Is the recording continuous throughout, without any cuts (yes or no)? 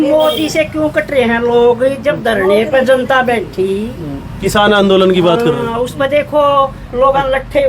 yes